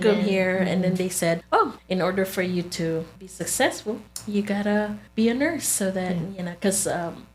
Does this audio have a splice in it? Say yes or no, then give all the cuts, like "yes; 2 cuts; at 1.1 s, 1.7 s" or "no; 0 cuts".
yes; 4 cuts; at 1.6 s, 3.2 s, 4.1 s, 5.0 s